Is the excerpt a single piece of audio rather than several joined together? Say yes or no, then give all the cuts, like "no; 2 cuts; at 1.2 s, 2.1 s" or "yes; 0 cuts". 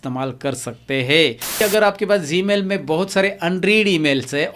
no; 1 cut; at 1.6 s